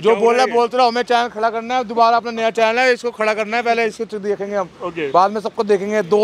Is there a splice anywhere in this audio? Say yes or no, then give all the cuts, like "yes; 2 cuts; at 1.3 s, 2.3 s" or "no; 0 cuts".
no; 0 cuts